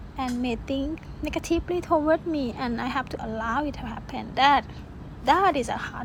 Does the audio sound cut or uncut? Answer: uncut